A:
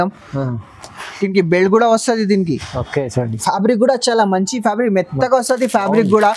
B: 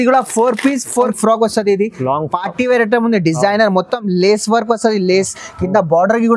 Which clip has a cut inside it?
B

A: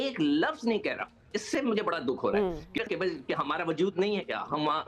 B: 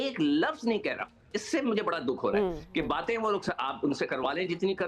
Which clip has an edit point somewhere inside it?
A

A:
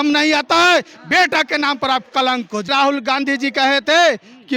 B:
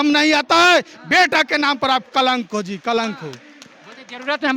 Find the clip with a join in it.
A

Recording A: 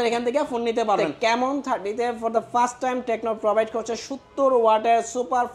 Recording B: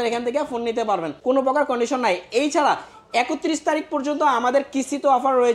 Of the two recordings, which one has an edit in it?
A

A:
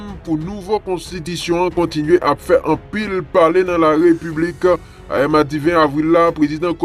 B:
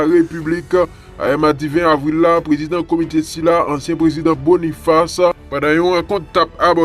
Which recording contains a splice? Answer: B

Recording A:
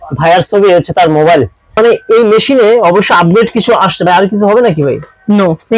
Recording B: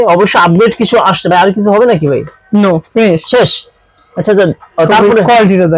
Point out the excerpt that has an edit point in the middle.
A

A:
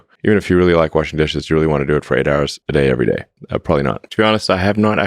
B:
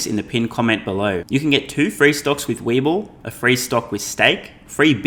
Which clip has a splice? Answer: A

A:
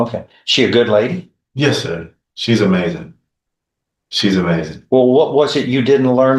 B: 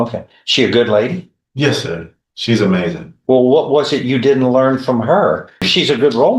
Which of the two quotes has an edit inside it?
B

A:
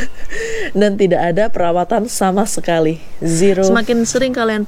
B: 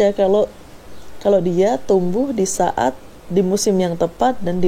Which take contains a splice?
A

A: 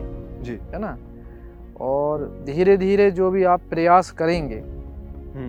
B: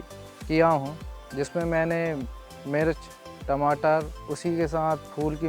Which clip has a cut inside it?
B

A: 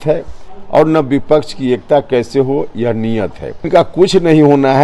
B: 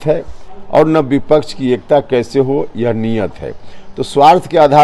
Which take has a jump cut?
A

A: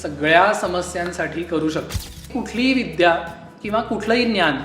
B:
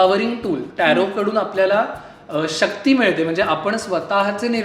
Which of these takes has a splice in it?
A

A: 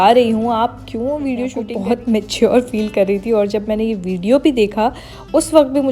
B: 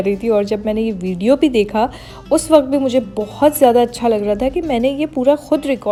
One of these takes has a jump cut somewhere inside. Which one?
A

